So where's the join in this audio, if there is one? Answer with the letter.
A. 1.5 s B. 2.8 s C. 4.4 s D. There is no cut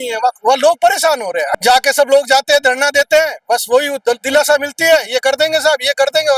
A